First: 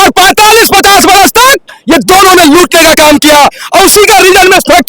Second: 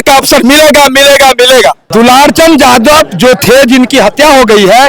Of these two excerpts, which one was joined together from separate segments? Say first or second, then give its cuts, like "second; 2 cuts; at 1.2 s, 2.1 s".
second; 1 cut; at 1.8 s